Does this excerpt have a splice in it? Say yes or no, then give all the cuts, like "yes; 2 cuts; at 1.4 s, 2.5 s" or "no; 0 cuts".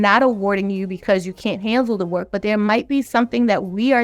no; 0 cuts